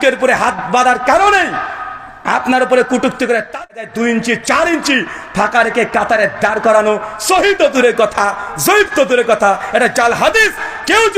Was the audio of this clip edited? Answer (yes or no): yes